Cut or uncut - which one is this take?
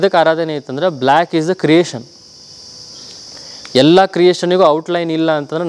uncut